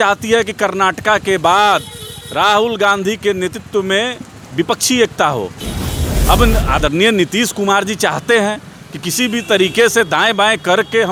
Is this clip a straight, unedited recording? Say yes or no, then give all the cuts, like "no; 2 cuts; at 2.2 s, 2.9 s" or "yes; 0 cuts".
yes; 0 cuts